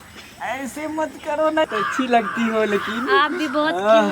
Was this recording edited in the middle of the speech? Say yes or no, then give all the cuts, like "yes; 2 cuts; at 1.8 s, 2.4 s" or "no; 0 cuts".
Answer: yes; 1 cut; at 1.7 s